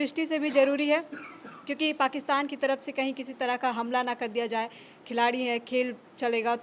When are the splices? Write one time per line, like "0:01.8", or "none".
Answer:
none